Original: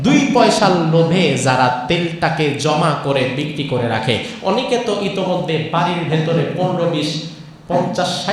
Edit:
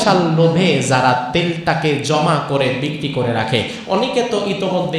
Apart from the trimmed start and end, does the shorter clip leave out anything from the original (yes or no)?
no